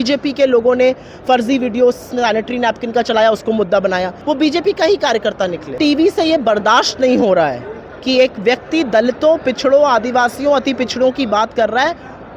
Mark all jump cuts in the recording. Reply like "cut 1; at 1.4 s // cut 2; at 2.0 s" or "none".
cut 1; at 4.1 s // cut 2; at 5.7 s